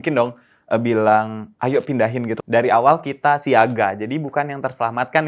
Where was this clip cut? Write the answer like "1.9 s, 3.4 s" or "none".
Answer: 2.4 s